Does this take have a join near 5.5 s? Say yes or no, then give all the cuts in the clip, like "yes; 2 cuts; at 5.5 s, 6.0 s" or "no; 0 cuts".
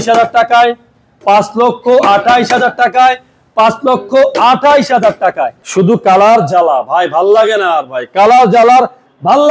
yes; 1 cut; at 5.5 s